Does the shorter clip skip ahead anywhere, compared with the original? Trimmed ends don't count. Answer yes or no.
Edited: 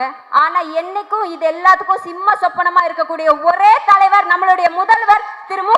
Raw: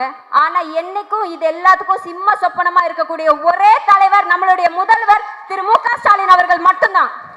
no